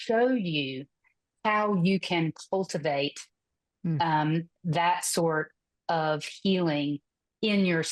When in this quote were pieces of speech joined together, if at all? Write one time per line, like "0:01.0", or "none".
none

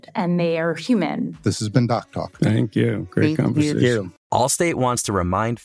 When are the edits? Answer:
0:04.2

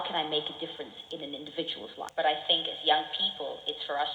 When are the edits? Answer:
0:02.1

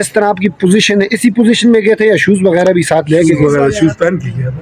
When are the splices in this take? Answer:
none

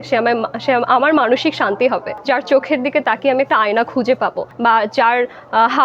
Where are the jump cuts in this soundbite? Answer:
0:02.1
0:04.5

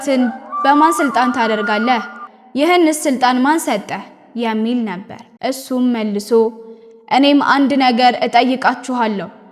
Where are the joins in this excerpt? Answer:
none

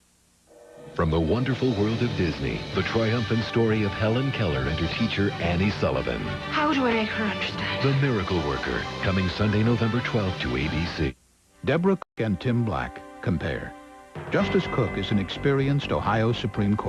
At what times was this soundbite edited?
none

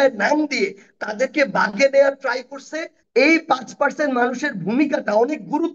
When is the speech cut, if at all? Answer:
0:02.9

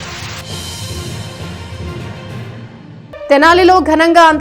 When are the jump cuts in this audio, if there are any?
0:03.0

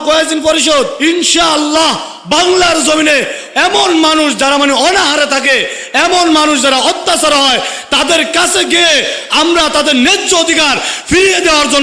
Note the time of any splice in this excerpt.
0:00.9
0:03.4

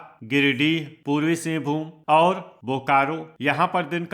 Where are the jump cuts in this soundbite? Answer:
0:00.9
0:01.9
0:03.3

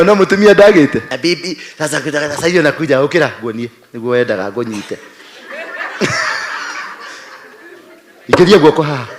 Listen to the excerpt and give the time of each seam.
0:01.1

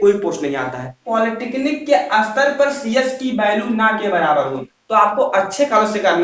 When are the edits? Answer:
0:01.0
0:04.7

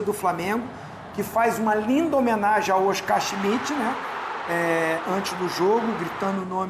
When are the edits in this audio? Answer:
none

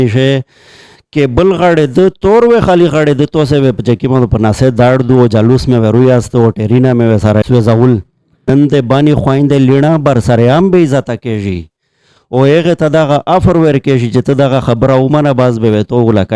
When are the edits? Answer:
0:07.4
0:08.5

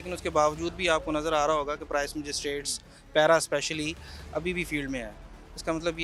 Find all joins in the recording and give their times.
none

